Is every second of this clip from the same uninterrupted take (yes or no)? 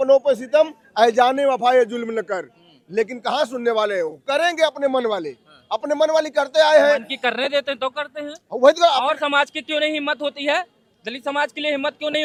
yes